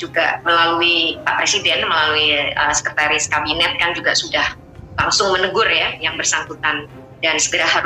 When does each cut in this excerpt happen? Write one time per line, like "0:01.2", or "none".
none